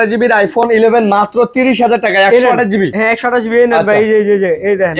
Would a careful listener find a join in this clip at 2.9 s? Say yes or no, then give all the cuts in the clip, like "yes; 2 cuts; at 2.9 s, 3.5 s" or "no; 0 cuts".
yes; 1 cut; at 2.9 s